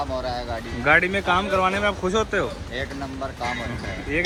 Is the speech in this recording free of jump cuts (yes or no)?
yes